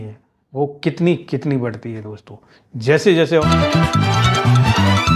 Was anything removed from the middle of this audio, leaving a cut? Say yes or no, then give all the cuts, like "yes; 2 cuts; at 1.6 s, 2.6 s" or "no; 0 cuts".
yes; 1 cut; at 3.4 s